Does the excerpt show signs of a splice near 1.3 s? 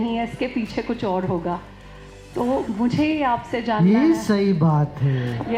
no; 0 cuts

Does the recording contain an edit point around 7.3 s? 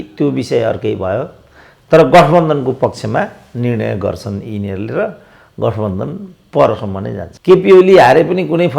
yes; 1 cut; at 7.3 s

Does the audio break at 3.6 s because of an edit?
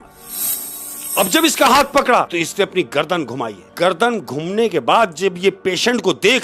yes; 2 cuts; at 2.3 s, 3.6 s

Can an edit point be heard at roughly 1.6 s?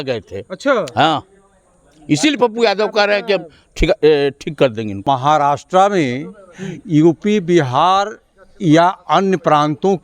no; 1 cut; at 5.0 s

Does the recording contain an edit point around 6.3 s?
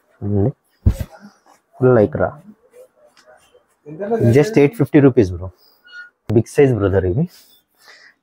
yes; 1 cut; at 6.3 s

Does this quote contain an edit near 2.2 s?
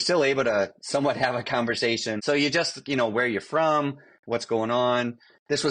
yes; 1 cut; at 2.2 s

